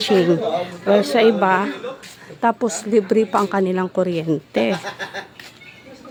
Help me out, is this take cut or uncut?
uncut